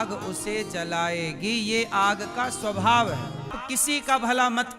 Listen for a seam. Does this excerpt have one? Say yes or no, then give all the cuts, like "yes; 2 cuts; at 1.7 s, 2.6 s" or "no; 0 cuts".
yes; 1 cut; at 3.6 s